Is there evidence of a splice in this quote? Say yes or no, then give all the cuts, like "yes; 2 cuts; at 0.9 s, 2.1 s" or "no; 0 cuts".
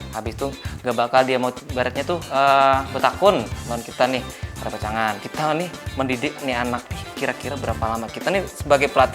yes; 2 cuts; at 1.6 s, 5.3 s